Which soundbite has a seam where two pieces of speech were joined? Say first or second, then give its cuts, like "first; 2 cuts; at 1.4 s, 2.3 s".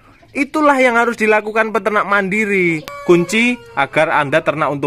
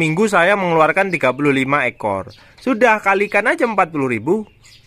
first; 1 cut; at 2.9 s